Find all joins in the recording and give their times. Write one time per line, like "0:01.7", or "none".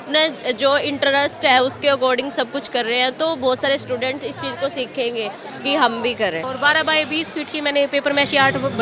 0:06.4